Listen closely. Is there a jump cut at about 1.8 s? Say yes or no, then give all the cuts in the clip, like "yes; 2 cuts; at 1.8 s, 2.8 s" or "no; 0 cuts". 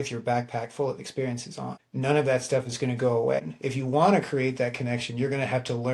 yes; 2 cuts; at 1.8 s, 3.5 s